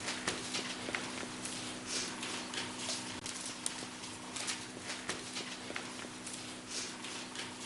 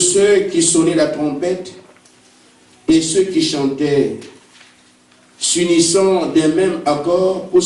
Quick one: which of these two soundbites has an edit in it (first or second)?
first